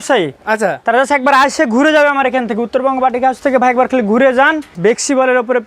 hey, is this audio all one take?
no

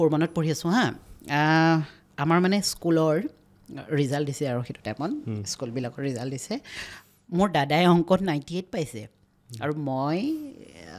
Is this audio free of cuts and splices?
yes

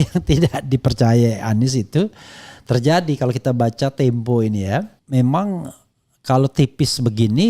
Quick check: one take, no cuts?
no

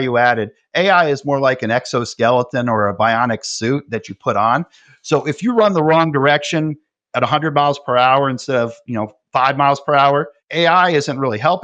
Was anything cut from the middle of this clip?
no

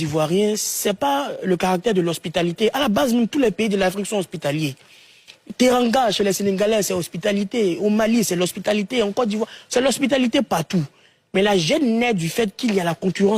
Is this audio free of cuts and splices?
yes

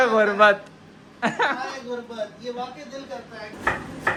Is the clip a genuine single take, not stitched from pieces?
yes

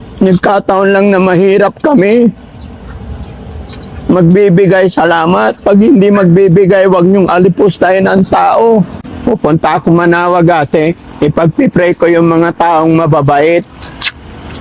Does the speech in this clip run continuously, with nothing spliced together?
no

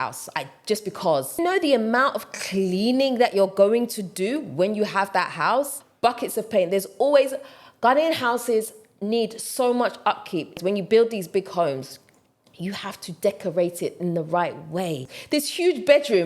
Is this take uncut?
no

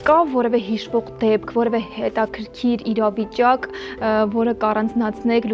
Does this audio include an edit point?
no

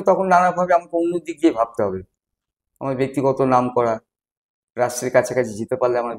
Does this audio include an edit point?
no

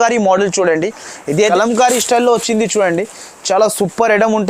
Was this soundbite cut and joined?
yes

